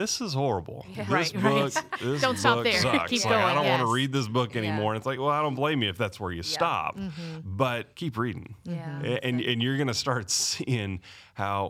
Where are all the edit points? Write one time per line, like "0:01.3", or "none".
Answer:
0:07.9